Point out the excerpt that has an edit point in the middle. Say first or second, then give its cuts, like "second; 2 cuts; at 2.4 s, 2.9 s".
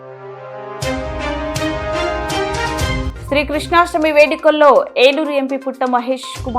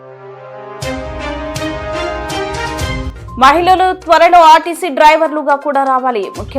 second; 1 cut; at 3.1 s